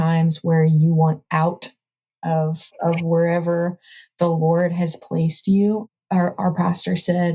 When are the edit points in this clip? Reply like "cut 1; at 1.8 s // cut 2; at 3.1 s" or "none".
cut 1; at 5.9 s